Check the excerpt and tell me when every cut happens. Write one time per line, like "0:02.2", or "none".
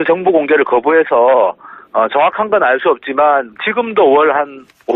0:03.2